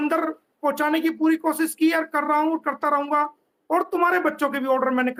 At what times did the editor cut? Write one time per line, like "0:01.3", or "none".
none